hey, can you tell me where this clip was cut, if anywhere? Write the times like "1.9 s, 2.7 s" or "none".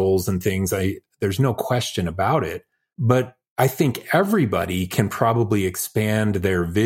3.1 s